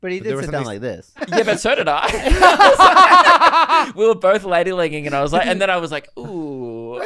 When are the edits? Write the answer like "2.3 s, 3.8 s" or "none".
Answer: 1.2 s